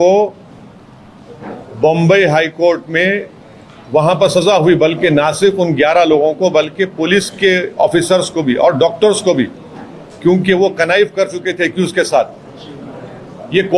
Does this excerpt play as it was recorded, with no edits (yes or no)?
yes